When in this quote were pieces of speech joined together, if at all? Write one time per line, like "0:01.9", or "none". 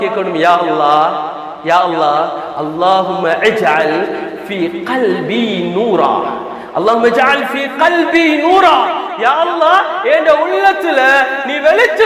none